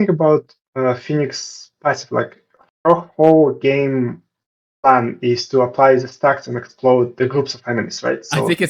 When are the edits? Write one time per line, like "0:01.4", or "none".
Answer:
none